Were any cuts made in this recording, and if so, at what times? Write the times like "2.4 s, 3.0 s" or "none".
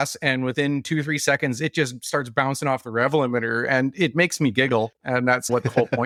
none